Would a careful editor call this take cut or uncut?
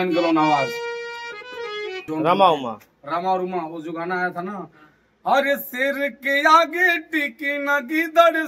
cut